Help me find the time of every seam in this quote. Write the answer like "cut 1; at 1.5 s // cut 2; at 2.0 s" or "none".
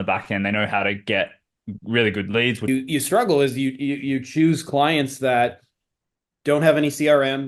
cut 1; at 2.7 s